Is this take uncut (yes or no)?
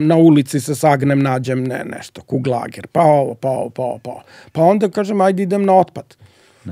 yes